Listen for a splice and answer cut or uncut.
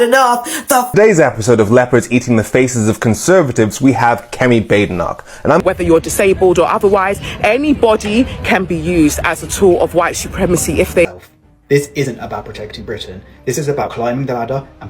cut